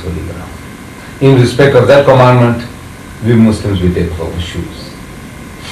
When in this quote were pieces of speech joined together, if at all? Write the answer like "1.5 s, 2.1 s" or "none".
none